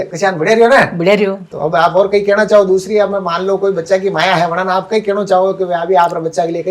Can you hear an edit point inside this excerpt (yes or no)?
yes